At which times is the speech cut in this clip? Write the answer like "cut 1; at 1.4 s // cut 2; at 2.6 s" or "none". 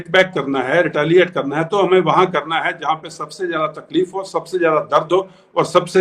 none